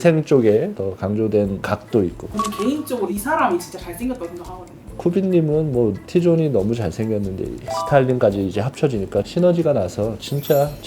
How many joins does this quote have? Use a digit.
1